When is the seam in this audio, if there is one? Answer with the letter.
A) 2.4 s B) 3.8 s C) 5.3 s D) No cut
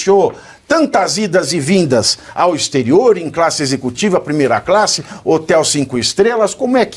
D